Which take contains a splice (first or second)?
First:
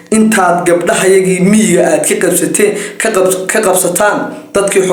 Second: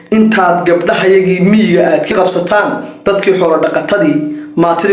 second